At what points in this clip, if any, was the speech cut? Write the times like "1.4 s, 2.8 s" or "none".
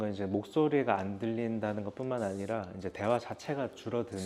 none